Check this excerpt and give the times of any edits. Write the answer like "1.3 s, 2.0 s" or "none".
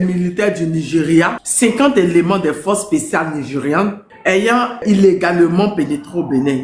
1.4 s, 4.8 s